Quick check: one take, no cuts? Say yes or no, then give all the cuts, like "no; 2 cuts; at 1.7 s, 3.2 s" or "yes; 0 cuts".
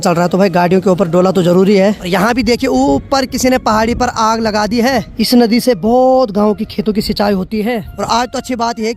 no; 3 cuts; at 2.0 s, 5.1 s, 7.9 s